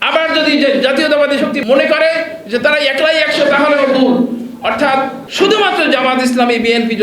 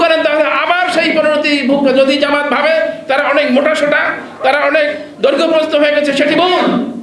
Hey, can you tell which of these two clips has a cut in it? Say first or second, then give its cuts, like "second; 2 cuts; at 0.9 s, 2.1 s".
first; 2 cuts; at 1.6 s, 5.2 s